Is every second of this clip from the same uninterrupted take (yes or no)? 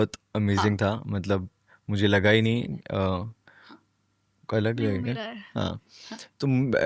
yes